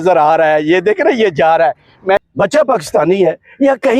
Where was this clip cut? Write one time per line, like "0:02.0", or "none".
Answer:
0:02.2